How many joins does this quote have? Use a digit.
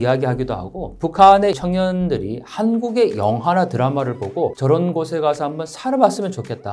3